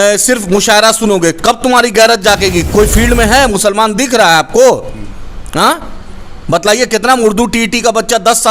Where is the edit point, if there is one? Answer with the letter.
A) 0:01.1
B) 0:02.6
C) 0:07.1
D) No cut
B